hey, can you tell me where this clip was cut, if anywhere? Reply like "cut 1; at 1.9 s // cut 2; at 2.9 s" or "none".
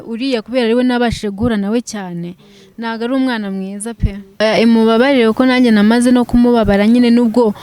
cut 1; at 4.4 s